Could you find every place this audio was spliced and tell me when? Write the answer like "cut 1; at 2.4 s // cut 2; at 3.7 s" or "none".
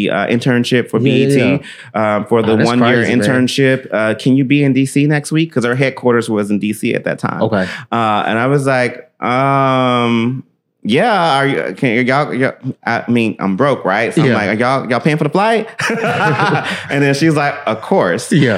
none